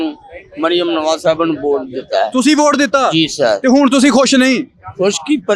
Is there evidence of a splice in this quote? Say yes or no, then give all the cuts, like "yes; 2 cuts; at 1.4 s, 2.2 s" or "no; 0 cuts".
no; 0 cuts